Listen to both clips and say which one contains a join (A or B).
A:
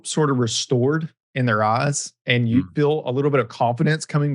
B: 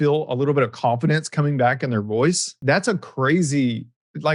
B